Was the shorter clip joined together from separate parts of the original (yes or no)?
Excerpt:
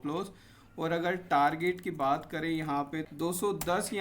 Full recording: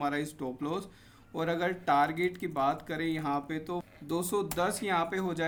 yes